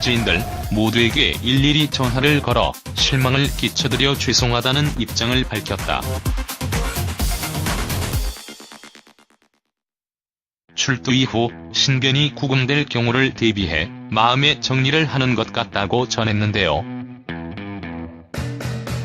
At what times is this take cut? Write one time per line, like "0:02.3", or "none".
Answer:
0:12.6